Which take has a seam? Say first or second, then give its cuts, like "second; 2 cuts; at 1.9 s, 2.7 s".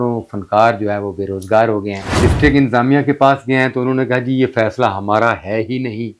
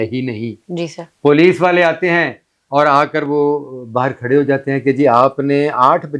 first; 1 cut; at 2.0 s